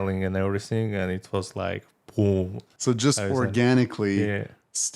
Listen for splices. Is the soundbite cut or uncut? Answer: cut